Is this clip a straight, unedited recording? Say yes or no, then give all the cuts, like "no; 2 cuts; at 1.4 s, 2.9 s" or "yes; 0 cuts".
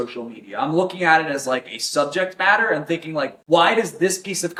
yes; 0 cuts